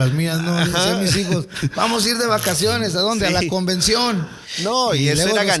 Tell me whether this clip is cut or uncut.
uncut